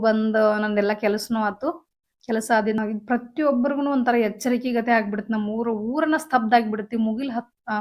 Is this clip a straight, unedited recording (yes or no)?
no